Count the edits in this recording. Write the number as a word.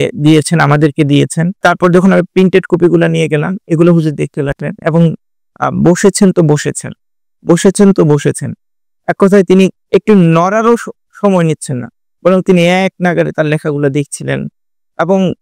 one